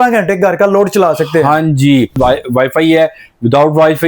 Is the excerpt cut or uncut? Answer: cut